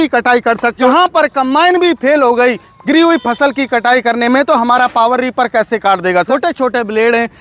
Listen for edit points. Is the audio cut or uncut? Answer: cut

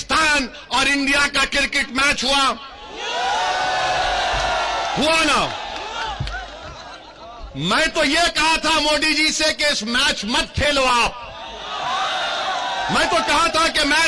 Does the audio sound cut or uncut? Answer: uncut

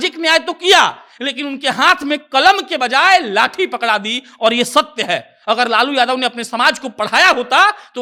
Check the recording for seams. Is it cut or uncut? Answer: uncut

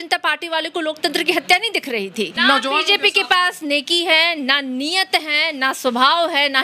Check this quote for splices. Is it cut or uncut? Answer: cut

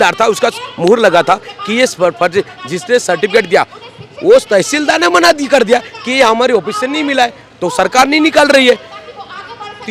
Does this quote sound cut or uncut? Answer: uncut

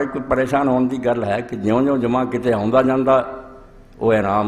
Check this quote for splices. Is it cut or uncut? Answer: uncut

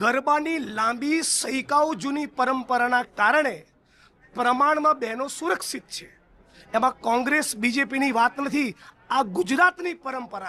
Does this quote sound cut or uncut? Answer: uncut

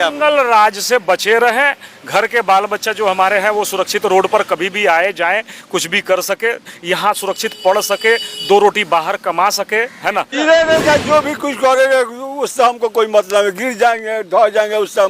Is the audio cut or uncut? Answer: cut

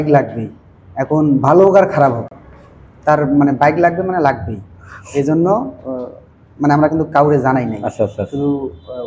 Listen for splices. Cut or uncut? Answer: uncut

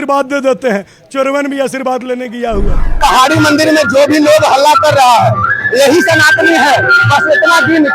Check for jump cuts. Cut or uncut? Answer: cut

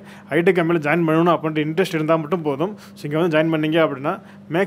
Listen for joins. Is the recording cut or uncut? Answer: uncut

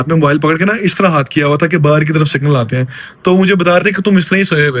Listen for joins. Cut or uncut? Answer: uncut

